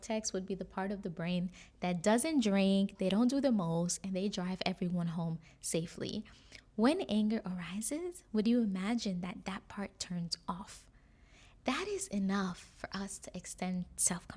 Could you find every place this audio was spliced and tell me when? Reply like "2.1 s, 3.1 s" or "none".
none

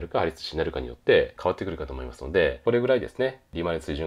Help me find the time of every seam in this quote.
1.3 s, 2.6 s

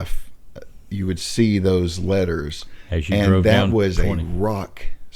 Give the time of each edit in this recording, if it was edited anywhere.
none

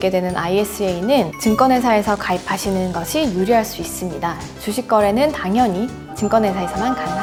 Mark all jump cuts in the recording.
none

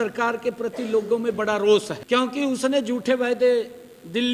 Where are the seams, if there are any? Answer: 2.0 s

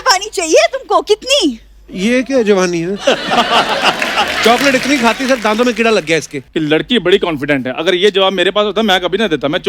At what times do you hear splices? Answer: 6.4 s

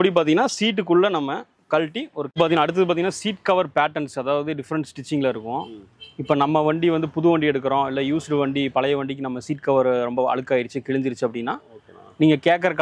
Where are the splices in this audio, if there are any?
2.3 s

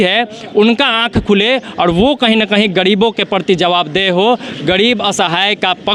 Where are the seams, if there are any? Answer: none

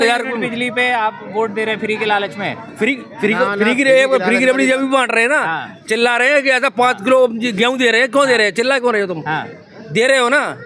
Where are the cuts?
none

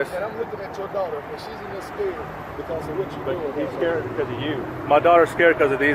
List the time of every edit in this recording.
none

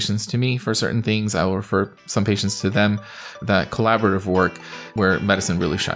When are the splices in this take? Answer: 3.4 s, 4.9 s

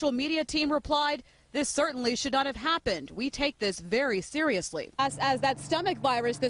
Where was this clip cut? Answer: none

